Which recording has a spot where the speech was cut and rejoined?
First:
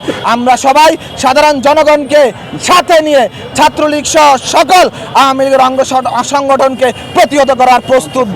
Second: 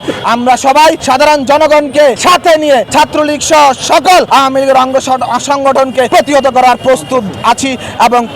second; 5 cuts; at 1.0 s, 2.2 s, 2.9 s, 4.3 s, 6.1 s

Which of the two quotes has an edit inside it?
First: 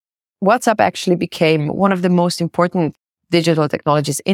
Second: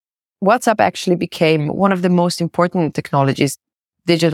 first; 1 cut; at 3.0 s

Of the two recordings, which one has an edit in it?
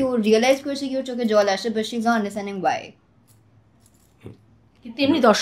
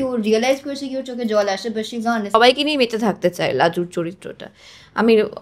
second; 1 cut; at 2.3 s

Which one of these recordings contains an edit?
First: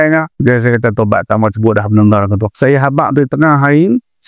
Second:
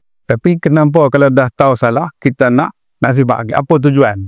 first; 1 cut; at 2.5 s

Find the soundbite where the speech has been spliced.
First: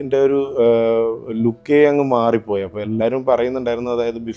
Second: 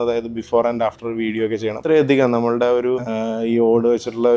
second; 2 cuts; at 1.8 s, 3.1 s

